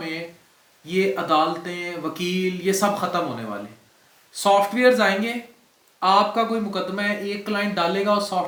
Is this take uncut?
yes; 0 cuts

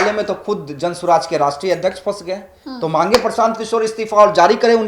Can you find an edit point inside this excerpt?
no; 0 cuts

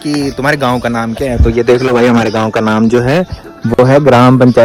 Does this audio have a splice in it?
no; 0 cuts

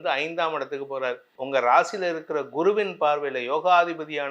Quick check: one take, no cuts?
no; 1 cut; at 1.3 s

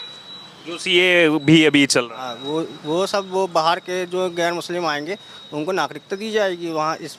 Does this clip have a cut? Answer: no; 0 cuts

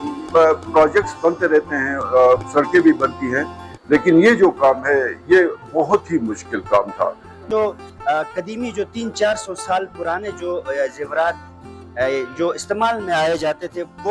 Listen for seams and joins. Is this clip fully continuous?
no; 1 cut; at 7.5 s

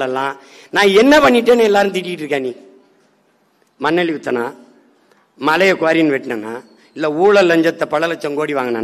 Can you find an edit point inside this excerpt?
no; 0 cuts

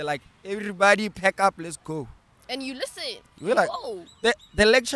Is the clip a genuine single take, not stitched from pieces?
yes; 0 cuts

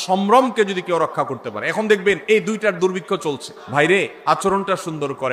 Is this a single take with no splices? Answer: no; 3 cuts; at 2.2 s, 3.2 s, 4.4 s

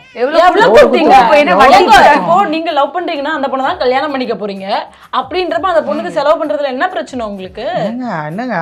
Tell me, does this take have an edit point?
no; 0 cuts

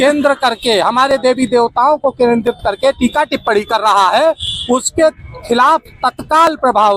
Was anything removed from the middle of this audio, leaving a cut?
no; 0 cuts

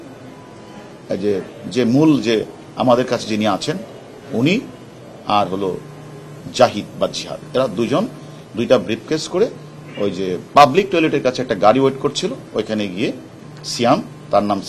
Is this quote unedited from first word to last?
yes; 0 cuts

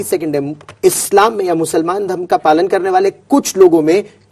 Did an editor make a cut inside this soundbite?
no; 0 cuts

